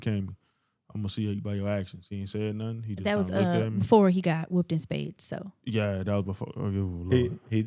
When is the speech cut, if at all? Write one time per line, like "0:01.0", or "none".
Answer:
none